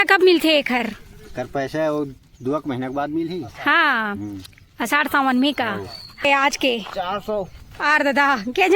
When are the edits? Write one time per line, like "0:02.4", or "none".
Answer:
0:06.2

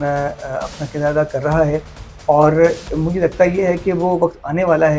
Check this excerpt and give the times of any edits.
none

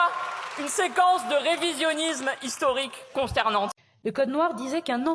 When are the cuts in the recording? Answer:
0:04.1

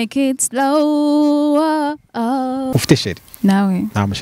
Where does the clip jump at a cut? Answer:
0:02.7

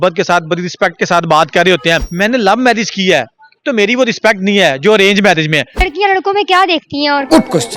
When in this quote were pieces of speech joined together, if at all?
0:02.1
0:05.8

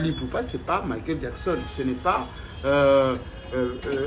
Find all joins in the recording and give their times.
none

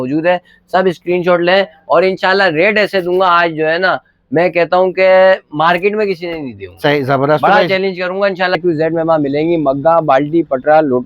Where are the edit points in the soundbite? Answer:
0:08.6

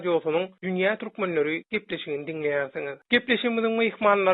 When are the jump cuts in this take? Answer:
none

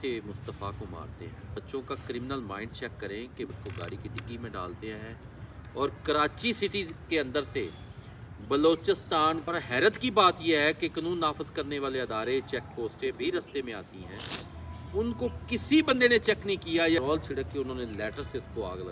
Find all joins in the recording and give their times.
0:01.6
0:03.6
0:09.4
0:17.0

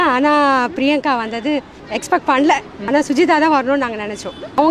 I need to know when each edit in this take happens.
none

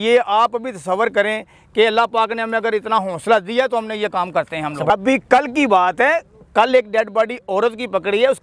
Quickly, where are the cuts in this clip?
0:04.8

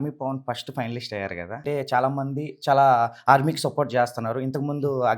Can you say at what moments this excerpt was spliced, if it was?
0:01.6

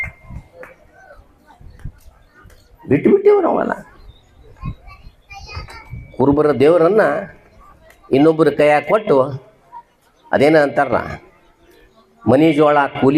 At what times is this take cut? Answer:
none

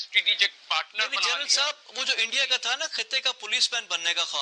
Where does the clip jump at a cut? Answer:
none

